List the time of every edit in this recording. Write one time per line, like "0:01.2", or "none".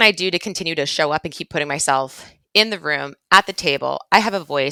none